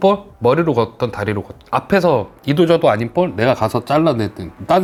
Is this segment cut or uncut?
uncut